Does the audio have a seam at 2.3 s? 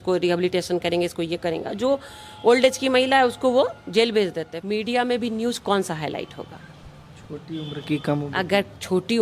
no; 1 cut; at 4.5 s

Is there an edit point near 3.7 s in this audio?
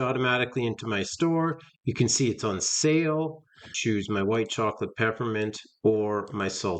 yes; 1 cut; at 3.7 s

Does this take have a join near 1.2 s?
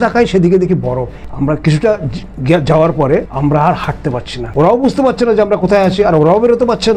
yes; 3 cuts; at 1.2 s, 3.3 s, 4.4 s

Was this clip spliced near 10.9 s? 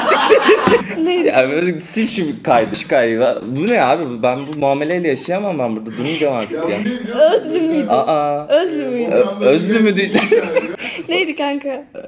yes; 3 cuts; at 0.8 s, 2.7 s, 10.9 s

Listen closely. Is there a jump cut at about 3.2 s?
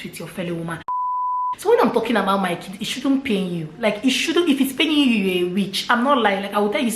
no; 1 cut; at 1.0 s

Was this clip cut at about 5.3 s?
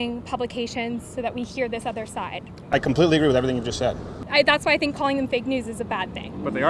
no; 1 cut; at 4.1 s

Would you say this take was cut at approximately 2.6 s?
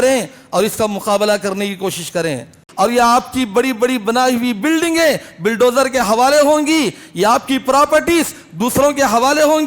yes; 1 cut; at 2.6 s

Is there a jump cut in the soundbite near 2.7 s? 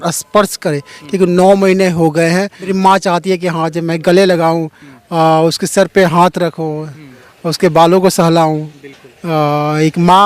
yes; 1 cut; at 2.7 s

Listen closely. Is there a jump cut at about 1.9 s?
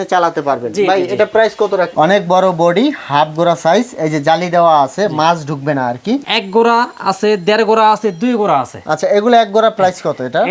yes; 2 cuts; at 1.9 s, 6.3 s

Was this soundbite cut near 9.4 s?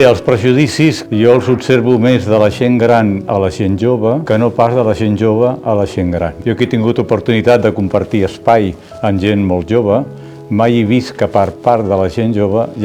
no; 3 cuts; at 1.0 s, 4.2 s, 6.3 s

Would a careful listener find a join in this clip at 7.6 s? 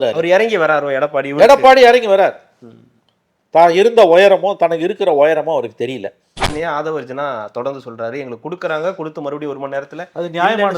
no; 1 cut; at 6.4 s

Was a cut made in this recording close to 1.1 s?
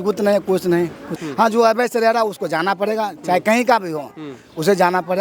yes; 1 cut; at 1.1 s

